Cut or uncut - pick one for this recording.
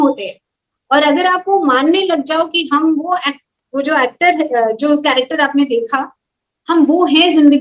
uncut